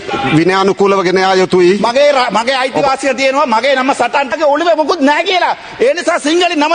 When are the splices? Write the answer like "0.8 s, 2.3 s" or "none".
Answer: 4.3 s